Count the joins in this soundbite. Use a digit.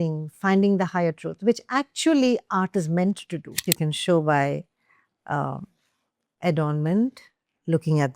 1